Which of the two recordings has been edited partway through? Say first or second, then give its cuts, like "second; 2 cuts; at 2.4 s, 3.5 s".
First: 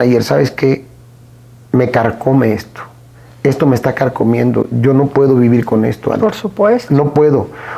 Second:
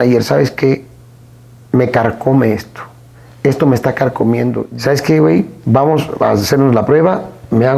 second; 1 cut; at 4.7 s